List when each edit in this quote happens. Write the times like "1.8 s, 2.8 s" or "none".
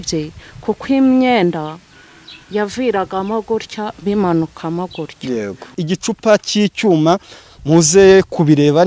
5.8 s